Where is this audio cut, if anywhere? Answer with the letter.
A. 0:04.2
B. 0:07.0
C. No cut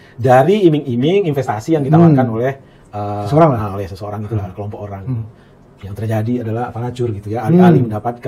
C